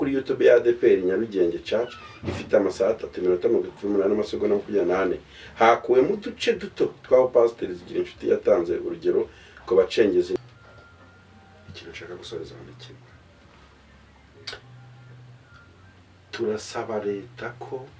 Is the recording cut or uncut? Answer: cut